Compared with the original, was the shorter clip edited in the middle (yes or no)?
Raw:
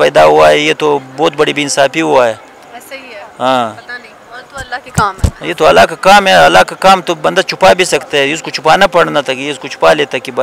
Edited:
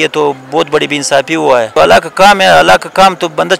yes